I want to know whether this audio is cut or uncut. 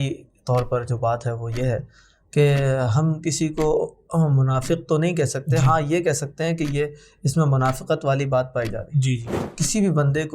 cut